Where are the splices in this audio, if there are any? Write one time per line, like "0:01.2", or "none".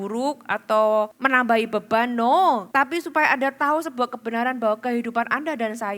0:01.2
0:02.7

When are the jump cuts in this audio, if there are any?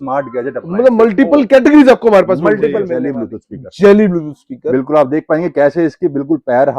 0:02.9

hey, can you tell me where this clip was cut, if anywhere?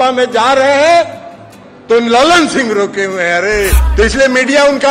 0:03.8

